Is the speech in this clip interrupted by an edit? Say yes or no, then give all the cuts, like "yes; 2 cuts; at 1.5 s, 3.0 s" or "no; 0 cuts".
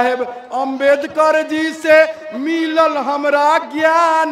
no; 0 cuts